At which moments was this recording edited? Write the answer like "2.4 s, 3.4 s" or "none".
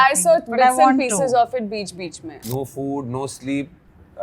2.4 s